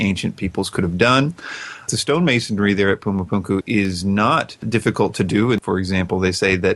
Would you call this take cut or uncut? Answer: cut